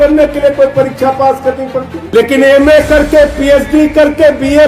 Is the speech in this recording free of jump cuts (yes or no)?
no